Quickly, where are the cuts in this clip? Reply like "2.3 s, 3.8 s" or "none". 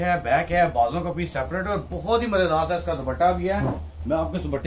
none